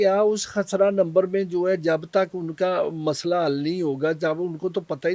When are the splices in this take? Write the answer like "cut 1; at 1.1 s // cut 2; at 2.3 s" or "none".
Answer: none

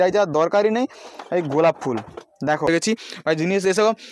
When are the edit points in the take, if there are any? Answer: cut 1; at 2.7 s

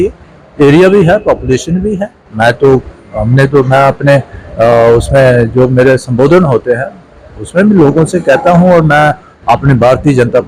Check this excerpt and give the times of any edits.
none

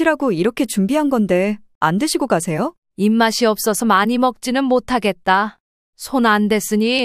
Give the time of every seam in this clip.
cut 1; at 2.8 s

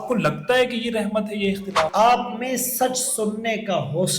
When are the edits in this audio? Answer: cut 1; at 1.9 s

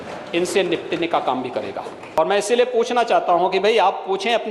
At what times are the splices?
cut 1; at 2.0 s

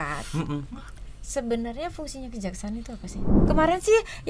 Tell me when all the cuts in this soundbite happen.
cut 1; at 3.4 s

